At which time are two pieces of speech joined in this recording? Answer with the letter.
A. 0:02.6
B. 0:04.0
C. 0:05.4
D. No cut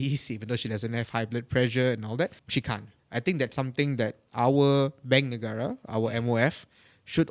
A